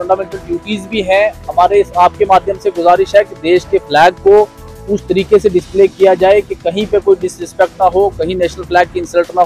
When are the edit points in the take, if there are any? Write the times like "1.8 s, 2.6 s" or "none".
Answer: none